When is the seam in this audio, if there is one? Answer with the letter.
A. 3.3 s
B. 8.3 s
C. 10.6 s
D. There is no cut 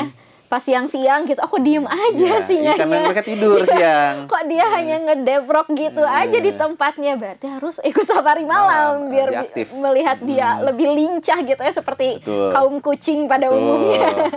D